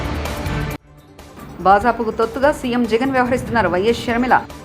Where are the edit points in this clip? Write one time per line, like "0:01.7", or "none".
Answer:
0:00.9